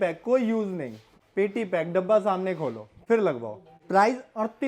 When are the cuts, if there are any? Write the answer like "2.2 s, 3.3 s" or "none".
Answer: 1.2 s, 3.0 s, 3.8 s